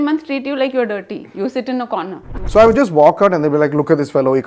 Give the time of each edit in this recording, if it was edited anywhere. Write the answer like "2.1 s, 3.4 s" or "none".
2.5 s